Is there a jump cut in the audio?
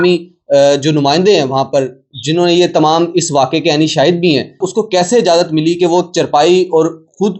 yes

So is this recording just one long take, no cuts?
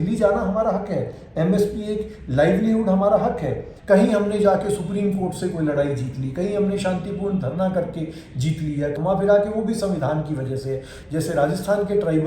no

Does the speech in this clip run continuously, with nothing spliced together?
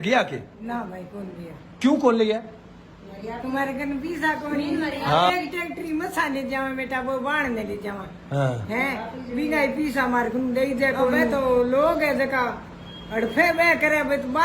no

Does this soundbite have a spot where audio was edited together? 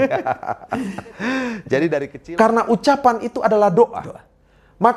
yes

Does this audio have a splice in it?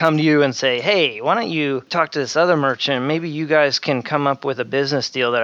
yes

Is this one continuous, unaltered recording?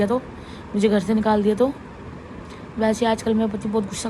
yes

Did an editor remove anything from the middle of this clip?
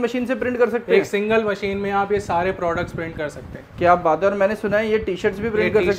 no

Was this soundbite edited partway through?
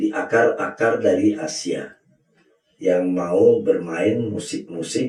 no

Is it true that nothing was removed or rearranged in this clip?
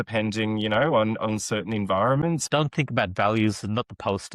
no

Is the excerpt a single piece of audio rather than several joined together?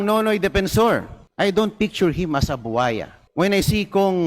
no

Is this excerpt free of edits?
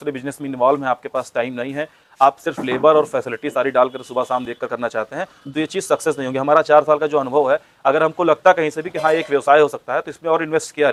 yes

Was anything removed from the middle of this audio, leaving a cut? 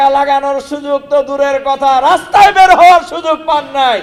no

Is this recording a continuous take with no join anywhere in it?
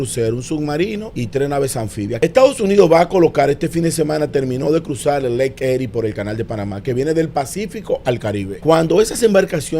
no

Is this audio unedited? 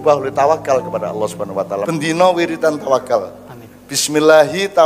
no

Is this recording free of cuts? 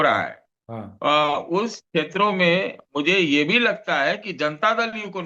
yes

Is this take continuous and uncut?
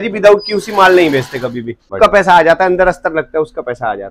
no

